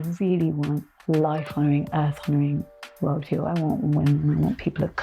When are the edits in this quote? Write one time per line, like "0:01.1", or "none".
0:00.9